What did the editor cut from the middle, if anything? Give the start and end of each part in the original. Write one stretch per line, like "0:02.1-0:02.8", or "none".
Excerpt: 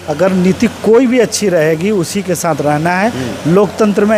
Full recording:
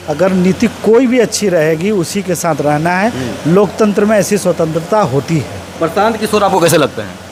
none